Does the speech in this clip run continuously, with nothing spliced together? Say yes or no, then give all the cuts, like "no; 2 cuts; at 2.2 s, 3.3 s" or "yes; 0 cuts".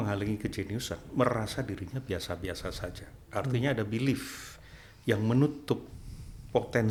yes; 0 cuts